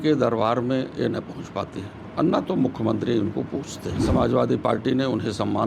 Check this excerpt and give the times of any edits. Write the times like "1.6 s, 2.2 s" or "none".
4.0 s